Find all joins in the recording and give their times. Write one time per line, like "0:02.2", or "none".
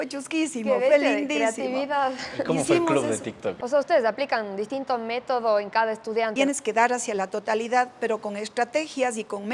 0:03.6
0:06.3